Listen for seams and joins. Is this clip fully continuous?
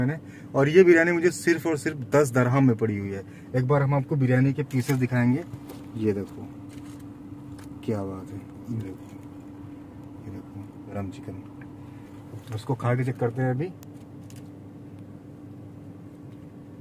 no; 2 cuts; at 8.8 s, 10.9 s

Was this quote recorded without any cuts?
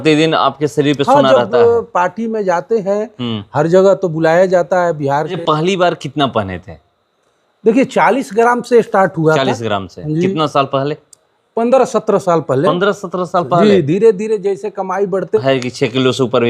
no; 2 cuts; at 5.4 s, 15.4 s

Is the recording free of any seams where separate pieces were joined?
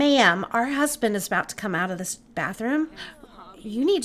yes; 0 cuts

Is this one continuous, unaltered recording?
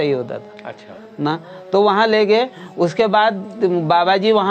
yes; 0 cuts

